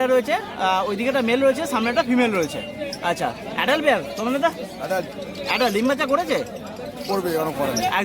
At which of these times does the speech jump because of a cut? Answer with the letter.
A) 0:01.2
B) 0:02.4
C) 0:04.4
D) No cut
D